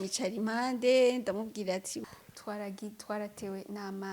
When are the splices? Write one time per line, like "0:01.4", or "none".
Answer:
0:02.0